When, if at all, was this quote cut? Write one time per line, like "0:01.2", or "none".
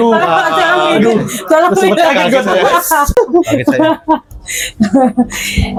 none

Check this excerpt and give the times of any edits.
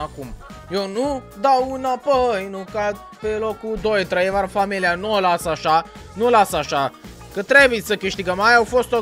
none

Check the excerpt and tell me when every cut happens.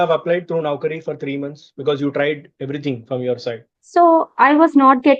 0:03.7

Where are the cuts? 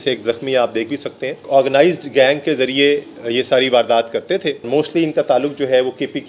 0:01.4
0:04.7

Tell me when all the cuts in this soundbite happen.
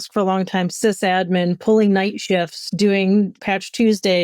0:03.3

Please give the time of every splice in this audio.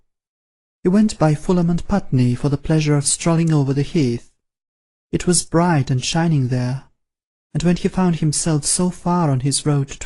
0:01.3

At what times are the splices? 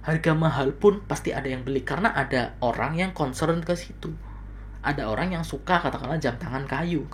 none

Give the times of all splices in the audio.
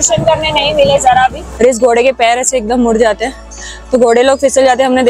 0:01.4

